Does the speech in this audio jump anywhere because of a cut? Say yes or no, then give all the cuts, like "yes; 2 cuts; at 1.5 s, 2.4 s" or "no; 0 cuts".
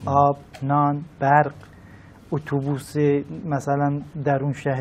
no; 0 cuts